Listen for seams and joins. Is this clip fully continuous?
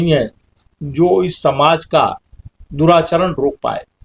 yes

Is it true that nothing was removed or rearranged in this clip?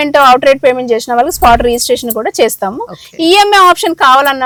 yes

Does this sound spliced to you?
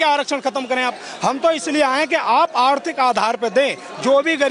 no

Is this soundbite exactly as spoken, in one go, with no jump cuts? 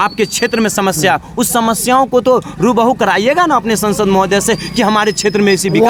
yes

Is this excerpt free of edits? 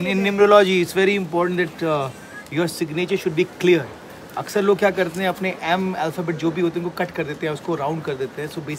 yes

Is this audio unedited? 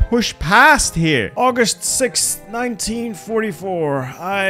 no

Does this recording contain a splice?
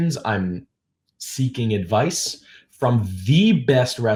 no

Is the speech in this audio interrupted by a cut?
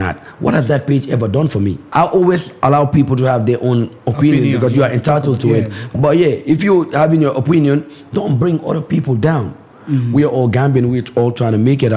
yes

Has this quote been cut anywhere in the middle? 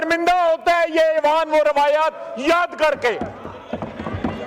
no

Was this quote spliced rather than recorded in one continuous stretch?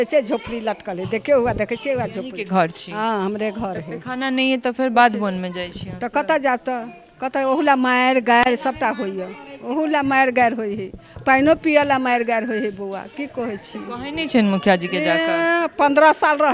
no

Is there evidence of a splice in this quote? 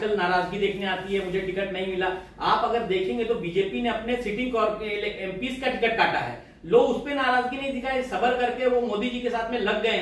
no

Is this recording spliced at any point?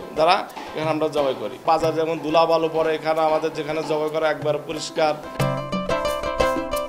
yes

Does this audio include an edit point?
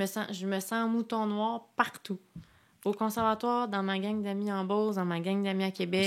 no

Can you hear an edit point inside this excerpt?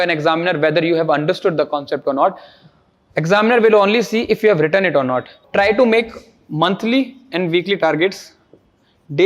yes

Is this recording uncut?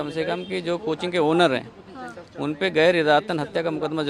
yes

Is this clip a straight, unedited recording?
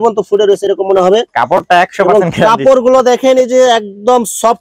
yes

